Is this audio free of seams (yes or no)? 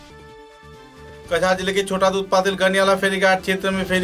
no